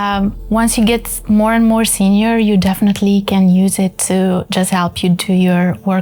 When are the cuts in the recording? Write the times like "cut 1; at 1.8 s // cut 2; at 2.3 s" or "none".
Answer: none